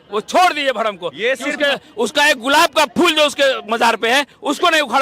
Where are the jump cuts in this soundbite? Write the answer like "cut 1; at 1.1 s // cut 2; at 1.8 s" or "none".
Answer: none